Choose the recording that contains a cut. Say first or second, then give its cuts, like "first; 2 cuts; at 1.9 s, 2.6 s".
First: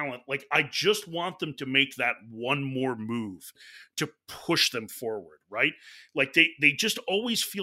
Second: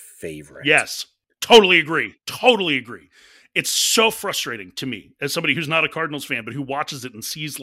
second; 1 cut; at 0.9 s